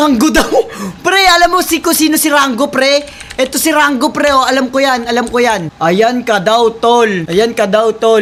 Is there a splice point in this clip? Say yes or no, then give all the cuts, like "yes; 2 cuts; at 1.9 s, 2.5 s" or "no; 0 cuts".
no; 0 cuts